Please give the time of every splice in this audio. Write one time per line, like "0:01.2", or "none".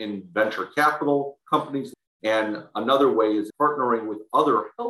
0:01.9
0:03.5